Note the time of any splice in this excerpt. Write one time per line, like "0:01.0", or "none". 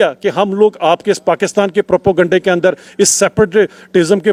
none